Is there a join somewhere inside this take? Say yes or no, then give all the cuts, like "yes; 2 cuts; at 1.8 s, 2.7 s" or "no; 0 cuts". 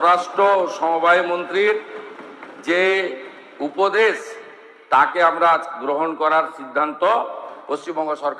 no; 0 cuts